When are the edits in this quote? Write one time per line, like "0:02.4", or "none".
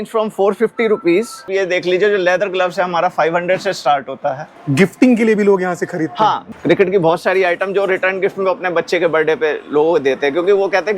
0:01.5
0:04.5
0:06.5